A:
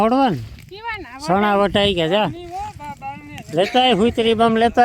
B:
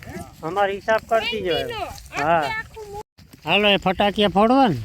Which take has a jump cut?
B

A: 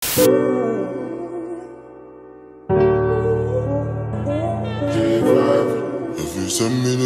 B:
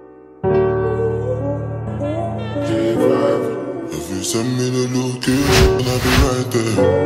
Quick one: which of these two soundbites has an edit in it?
B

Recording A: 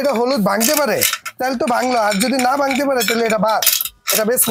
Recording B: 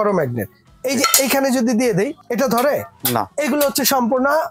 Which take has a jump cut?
B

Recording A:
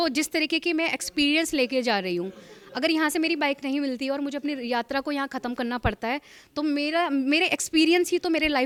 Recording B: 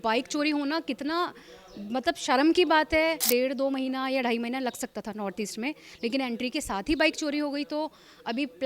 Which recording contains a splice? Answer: B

